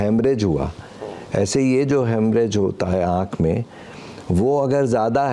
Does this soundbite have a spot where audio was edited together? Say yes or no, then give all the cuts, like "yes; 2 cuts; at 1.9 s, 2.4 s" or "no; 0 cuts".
no; 0 cuts